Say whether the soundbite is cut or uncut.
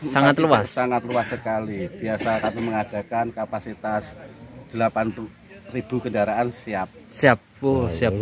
uncut